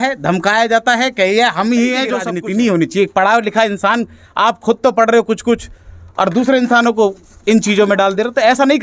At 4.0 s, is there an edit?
no; 1 cut; at 2.3 s

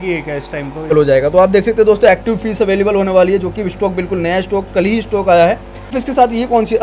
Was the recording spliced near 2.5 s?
no; 2 cuts; at 0.9 s, 6.0 s

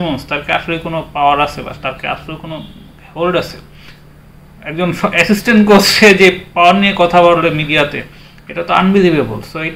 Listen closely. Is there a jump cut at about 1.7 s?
no; 0 cuts

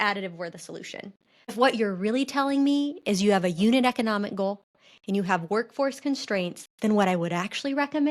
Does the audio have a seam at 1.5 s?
yes; 1 cut; at 1.5 s

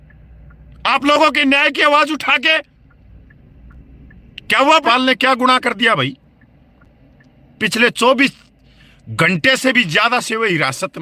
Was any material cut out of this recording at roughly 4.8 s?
yes; 1 cut; at 4.8 s

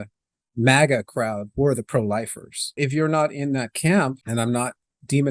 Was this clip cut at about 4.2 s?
yes; 2 cuts; at 2.8 s, 4.2 s

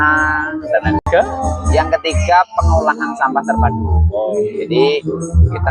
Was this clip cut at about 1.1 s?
yes; 1 cut; at 1.1 s

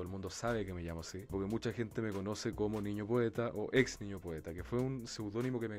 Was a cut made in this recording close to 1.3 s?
yes; 1 cut; at 1.3 s

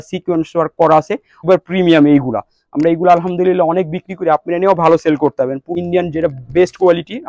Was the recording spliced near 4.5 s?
no; 2 cuts; at 1.4 s, 5.7 s

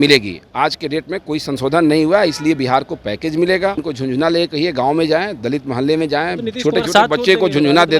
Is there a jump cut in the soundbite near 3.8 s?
yes; 1 cut; at 3.8 s

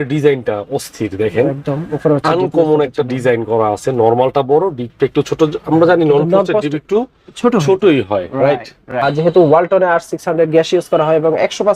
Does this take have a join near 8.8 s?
yes; 1 cut; at 8.8 s

